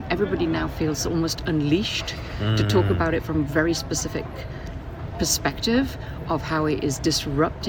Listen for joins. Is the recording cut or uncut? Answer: uncut